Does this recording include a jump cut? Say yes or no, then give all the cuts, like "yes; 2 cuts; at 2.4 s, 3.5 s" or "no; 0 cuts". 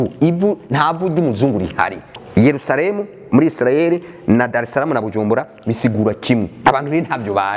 yes; 1 cut; at 2.1 s